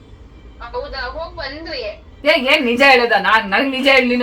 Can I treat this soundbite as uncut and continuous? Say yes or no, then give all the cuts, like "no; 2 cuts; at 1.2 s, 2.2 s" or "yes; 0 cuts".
no; 1 cut; at 2.1 s